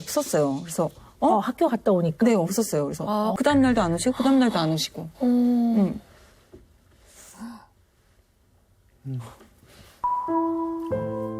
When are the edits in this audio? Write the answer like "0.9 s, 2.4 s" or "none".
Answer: 3.4 s